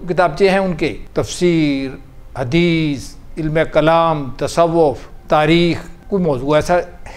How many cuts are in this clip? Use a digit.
3